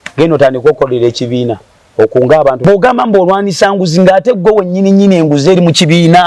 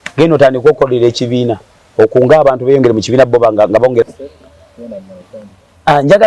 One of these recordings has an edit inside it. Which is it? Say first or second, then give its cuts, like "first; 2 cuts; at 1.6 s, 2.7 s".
first; 1 cut; at 2.6 s